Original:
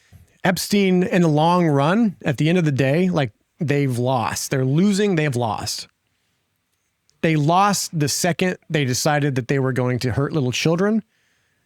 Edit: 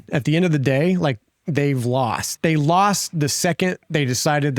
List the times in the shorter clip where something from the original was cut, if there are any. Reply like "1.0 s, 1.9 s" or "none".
2.3 s